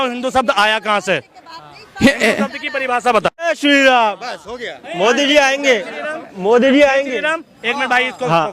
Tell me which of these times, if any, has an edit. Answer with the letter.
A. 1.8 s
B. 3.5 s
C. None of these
B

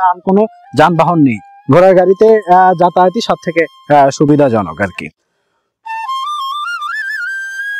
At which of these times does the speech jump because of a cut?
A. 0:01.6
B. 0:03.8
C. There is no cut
C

